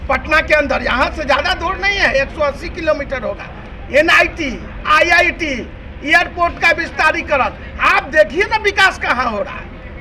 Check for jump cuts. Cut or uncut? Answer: uncut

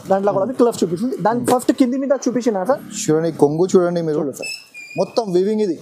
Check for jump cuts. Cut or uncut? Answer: cut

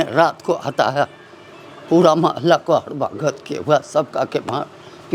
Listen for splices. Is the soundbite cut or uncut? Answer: uncut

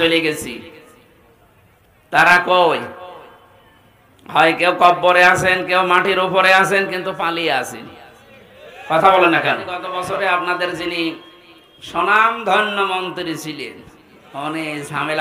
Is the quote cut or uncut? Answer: cut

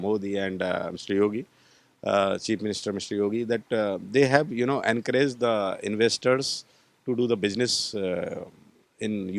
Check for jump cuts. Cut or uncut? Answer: uncut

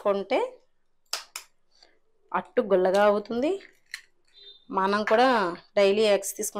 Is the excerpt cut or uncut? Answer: uncut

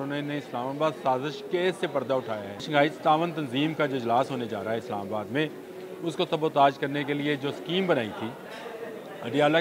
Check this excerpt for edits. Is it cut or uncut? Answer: cut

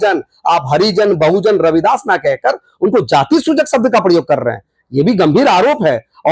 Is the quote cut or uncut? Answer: uncut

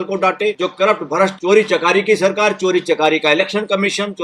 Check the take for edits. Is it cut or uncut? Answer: cut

